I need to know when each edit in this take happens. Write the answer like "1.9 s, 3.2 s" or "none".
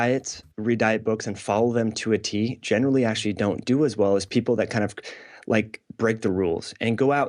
none